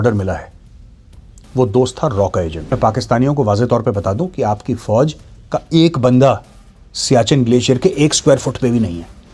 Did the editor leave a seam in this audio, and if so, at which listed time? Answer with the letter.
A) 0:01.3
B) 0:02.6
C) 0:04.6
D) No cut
B